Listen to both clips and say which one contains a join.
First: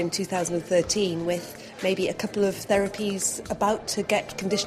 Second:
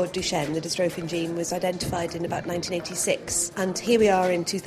second; 1 cut; at 3.4 s

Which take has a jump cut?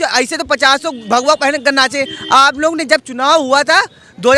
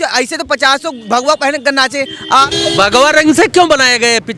second; 1 cut; at 2.5 s

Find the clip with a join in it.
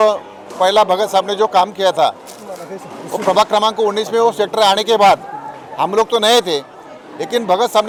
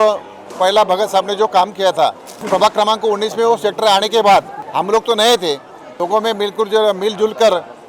second; 3 cuts; at 2.3 s, 4.6 s, 5.9 s

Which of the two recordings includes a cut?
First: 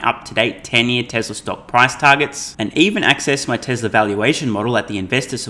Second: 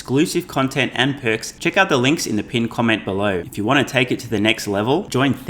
second; 2 cuts; at 1.5 s, 3.5 s

